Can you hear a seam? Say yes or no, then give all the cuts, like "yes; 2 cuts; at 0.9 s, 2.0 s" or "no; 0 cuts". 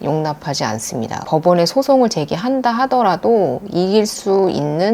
yes; 1 cut; at 1.2 s